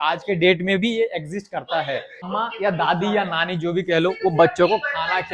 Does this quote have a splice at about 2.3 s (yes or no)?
yes